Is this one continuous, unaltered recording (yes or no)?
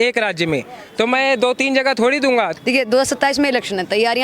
no